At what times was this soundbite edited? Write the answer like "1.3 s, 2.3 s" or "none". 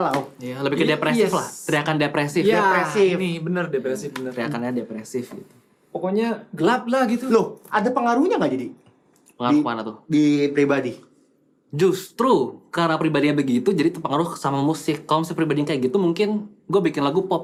none